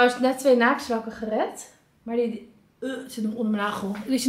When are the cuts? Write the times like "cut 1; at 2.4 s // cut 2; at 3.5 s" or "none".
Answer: none